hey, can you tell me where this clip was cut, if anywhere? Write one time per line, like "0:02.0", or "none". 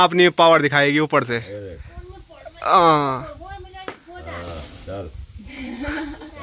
none